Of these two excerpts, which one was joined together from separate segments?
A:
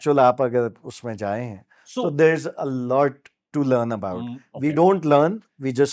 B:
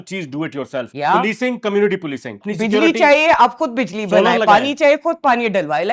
B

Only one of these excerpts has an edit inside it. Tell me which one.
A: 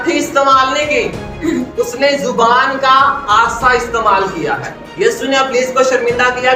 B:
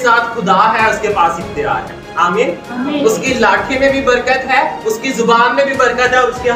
A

